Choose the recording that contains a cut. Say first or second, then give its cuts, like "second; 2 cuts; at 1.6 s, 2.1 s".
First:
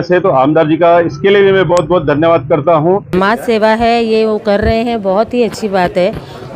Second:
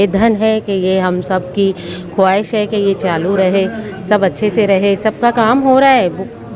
first; 1 cut; at 3.1 s